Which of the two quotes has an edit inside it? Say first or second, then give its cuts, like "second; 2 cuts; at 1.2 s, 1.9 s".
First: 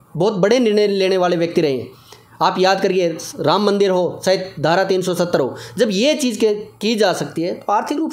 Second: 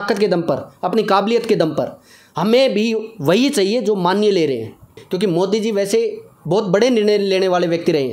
second; 1 cut; at 5.0 s